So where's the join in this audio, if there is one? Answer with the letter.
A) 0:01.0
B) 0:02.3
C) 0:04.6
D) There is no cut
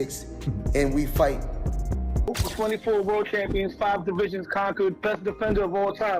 B